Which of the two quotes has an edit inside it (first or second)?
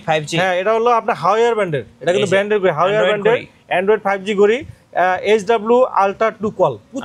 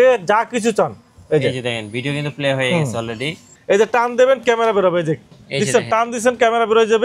second